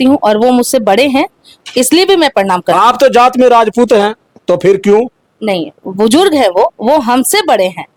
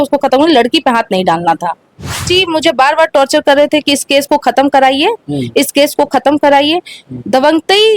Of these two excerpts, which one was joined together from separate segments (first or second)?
second